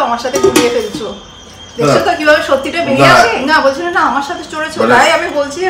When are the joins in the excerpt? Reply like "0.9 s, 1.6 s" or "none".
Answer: 3.4 s